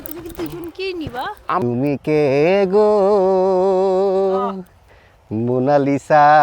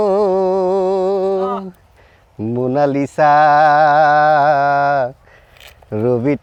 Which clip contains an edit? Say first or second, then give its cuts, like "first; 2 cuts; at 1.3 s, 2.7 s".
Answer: first; 1 cut; at 1.6 s